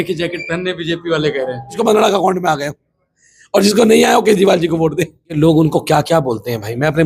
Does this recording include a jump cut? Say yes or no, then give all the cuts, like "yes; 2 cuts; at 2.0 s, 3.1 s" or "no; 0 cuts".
yes; 2 cuts; at 1.8 s, 5.4 s